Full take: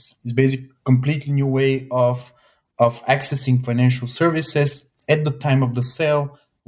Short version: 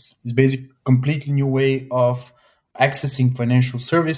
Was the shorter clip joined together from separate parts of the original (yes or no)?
yes